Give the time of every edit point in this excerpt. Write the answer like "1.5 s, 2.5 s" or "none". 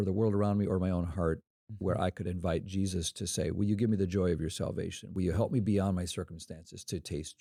none

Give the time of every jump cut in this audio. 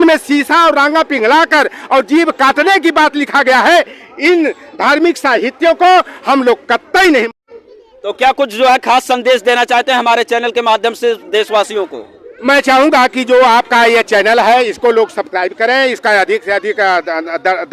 7.3 s

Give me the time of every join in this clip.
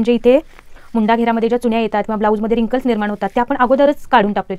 none

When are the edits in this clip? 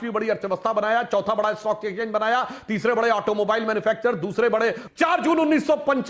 4.8 s

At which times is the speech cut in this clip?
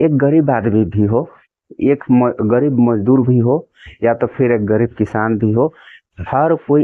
none

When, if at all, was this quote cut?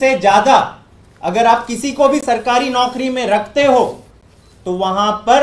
none

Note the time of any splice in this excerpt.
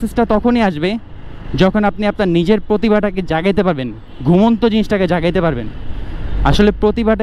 none

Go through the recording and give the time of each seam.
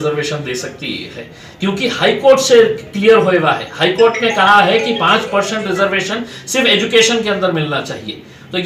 none

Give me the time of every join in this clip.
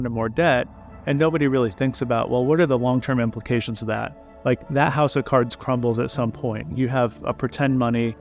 none

